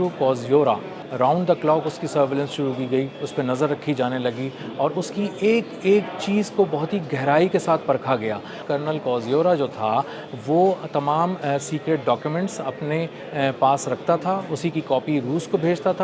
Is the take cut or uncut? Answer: cut